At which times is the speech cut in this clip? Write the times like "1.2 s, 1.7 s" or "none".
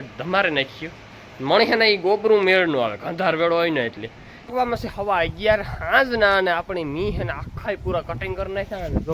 4.5 s